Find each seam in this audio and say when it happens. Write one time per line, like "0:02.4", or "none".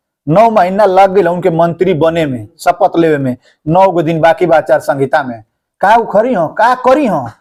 none